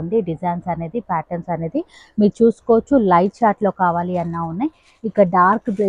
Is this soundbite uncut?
yes; 0 cuts

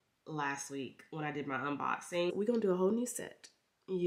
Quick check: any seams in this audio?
yes; 1 cut; at 2.3 s

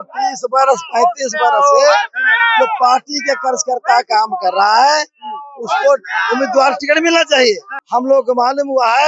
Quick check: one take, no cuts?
no; 1 cut; at 7.7 s

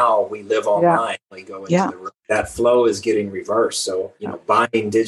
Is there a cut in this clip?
yes; 1 cut; at 2.2 s

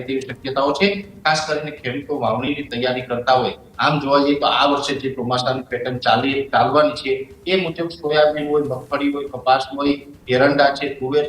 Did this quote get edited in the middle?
no; 0 cuts

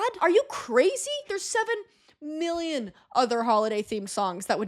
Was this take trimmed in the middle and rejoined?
yes; 1 cut; at 1.2 s

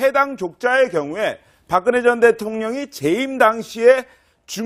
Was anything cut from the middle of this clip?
no; 0 cuts

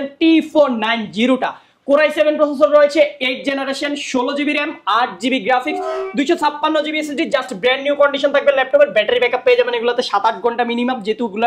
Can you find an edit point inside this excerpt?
no; 0 cuts

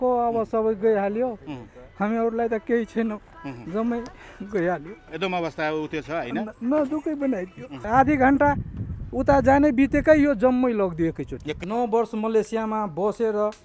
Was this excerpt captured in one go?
no; 2 cuts; at 7.8 s, 11.5 s

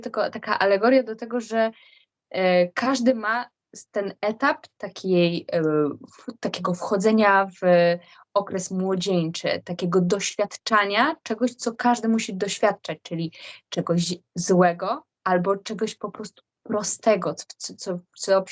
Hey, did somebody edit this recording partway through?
no; 0 cuts

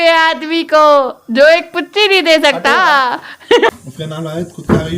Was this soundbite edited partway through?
yes; 1 cut; at 3.7 s

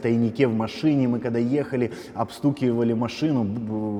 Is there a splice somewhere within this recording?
no; 0 cuts

